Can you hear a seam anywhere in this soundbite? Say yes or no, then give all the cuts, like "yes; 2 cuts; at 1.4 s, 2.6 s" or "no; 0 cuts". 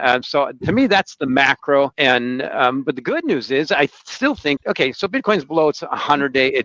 yes; 2 cuts; at 1.9 s, 4.6 s